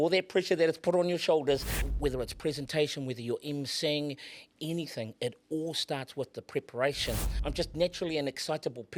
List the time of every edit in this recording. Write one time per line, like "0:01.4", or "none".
0:01.9
0:07.3

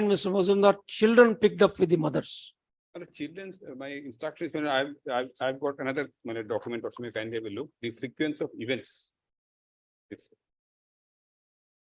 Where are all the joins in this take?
none

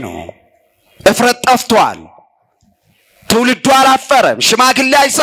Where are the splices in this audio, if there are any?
none

